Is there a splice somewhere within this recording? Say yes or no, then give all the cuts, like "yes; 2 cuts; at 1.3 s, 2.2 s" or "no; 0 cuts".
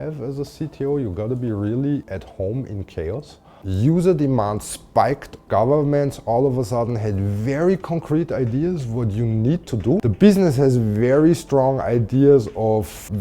yes; 3 cuts; at 3.5 s, 5.4 s, 10.0 s